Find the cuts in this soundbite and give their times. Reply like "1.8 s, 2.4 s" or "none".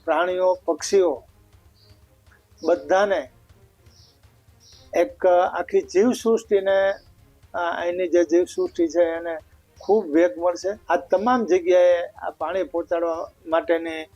10.7 s